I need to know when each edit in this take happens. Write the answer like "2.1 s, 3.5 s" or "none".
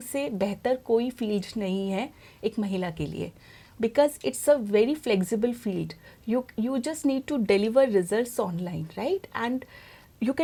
none